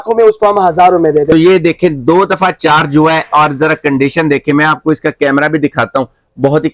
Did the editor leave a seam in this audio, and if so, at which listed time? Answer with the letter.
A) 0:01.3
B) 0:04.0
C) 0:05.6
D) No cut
A